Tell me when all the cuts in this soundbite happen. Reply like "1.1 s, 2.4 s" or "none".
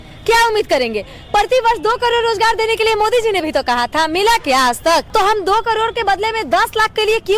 5.1 s